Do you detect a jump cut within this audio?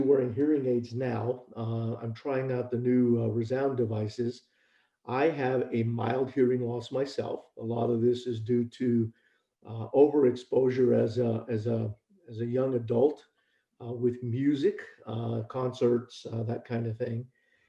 no; 0 cuts

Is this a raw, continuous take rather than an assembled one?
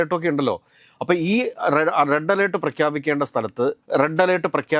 yes; 0 cuts

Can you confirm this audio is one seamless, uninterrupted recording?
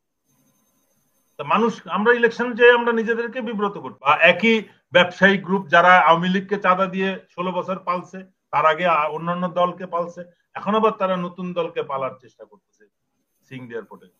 no; 1 cut; at 4.1 s

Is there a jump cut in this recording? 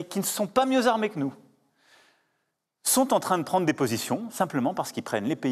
no; 0 cuts

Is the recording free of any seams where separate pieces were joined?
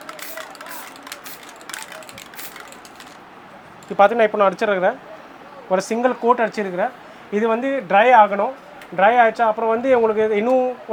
yes; 0 cuts

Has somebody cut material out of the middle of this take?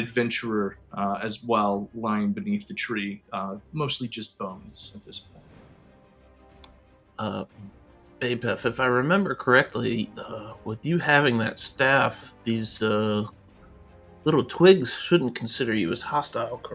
no; 0 cuts

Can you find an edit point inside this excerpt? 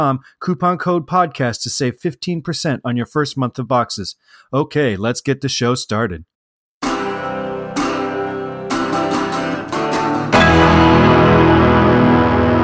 yes; 1 cut; at 6.6 s

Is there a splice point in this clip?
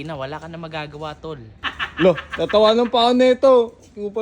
yes; 1 cut; at 1.7 s

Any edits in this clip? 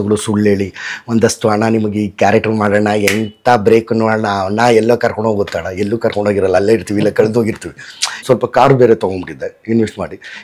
yes; 1 cut; at 8.2 s

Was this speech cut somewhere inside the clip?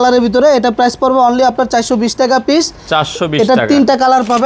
no; 0 cuts

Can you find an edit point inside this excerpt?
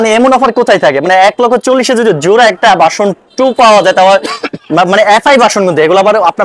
no; 0 cuts

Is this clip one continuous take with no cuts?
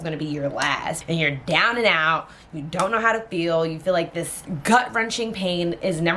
no; 2 cuts; at 1.0 s, 4.4 s

